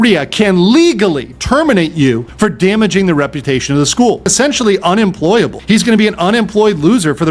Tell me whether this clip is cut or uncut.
cut